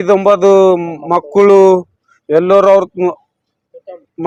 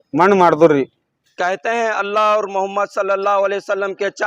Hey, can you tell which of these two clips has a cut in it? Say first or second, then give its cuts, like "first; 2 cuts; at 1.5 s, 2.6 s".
second; 1 cut; at 1.2 s